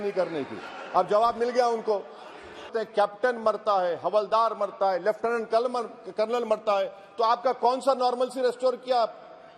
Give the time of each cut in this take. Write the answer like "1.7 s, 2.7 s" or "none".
2.7 s

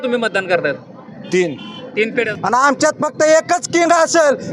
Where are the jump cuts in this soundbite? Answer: 2.3 s

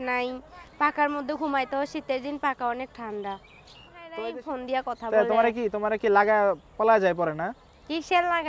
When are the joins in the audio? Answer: 4.2 s

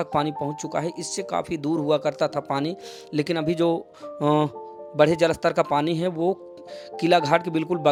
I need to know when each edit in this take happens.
none

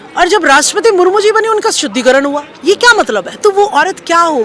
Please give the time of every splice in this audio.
3.3 s

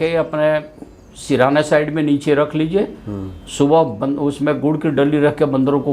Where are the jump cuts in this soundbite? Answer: none

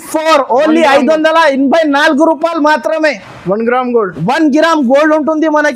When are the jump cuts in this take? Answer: none

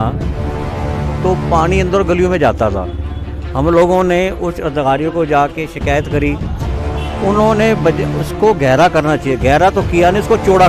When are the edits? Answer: none

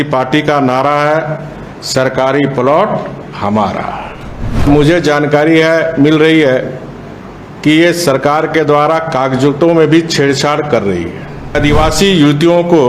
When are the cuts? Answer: 4.7 s, 11.5 s

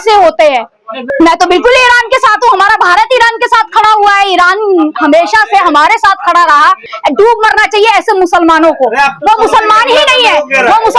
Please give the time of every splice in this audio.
1.0 s, 6.9 s

